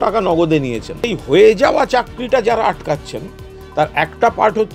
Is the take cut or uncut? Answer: cut